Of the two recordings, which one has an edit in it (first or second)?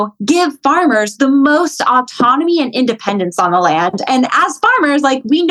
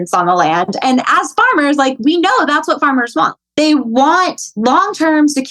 second